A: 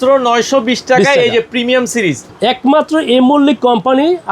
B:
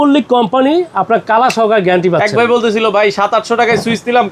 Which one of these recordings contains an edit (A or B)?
A